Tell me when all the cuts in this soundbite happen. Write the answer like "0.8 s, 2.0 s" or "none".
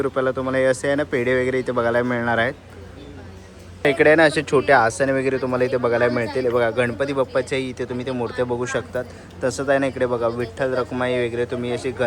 none